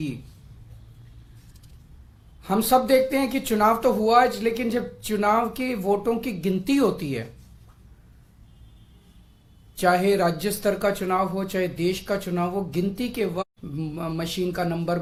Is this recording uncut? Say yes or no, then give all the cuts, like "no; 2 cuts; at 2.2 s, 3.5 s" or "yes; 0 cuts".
yes; 0 cuts